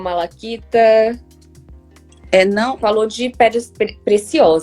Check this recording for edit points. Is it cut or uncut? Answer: cut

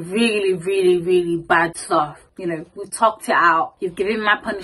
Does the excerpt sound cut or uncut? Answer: cut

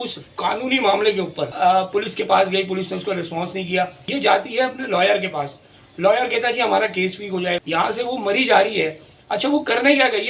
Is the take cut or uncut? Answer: cut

